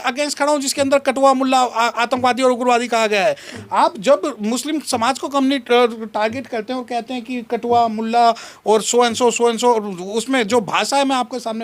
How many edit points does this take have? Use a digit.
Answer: 0